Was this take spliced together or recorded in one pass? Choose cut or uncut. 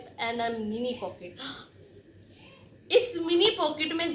uncut